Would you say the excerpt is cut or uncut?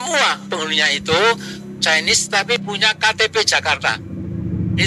uncut